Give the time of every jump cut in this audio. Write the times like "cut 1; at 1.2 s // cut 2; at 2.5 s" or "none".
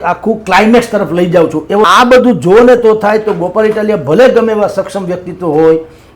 cut 1; at 1.8 s